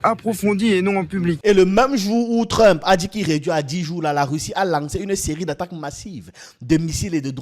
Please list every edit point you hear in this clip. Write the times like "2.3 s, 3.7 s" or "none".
1.4 s